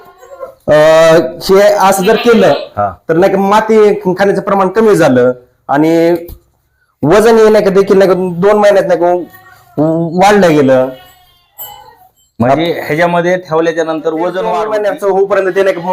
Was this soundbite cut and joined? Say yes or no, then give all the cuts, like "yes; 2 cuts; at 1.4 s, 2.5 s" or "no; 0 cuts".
yes; 1 cut; at 14.6 s